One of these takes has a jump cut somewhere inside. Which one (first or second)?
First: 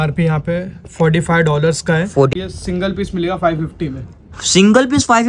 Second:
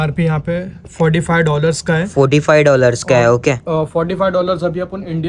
first